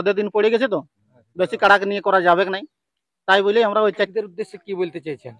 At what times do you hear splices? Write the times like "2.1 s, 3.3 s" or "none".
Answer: 3.9 s